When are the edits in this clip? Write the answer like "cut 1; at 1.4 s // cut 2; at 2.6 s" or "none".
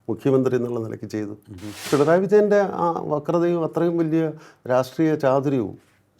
cut 1; at 1.8 s

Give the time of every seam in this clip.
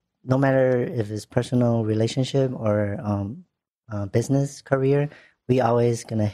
none

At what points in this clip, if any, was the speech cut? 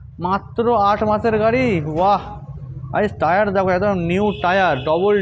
none

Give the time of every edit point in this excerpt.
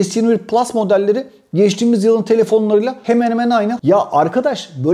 cut 1; at 3.8 s

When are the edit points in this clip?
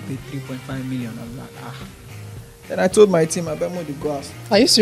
none

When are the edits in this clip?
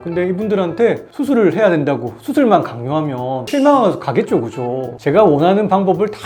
none

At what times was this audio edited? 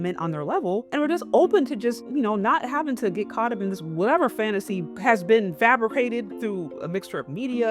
cut 1; at 0.9 s // cut 2; at 2.0 s // cut 3; at 4.8 s

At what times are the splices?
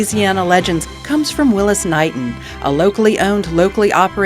cut 1; at 0.9 s

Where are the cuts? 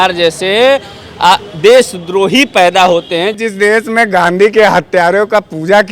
cut 1; at 3.4 s

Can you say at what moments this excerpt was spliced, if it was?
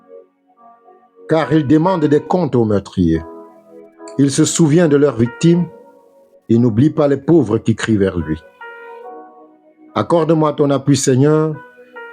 cut 1; at 1.3 s

